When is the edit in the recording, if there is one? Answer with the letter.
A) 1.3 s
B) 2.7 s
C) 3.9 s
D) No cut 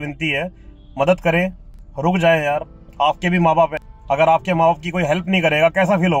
C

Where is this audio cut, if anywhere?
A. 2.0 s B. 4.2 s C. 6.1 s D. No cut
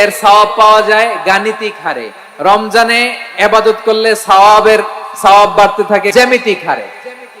C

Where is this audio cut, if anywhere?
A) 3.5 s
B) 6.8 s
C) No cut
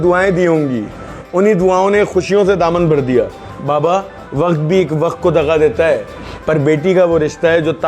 A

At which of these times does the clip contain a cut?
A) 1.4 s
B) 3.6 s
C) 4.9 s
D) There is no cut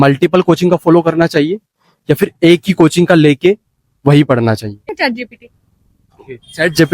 C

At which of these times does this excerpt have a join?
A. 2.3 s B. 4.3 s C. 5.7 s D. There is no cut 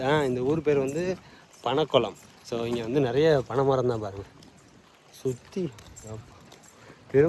D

